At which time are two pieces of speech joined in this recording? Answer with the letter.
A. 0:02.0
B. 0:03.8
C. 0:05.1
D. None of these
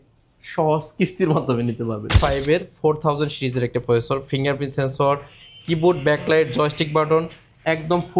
A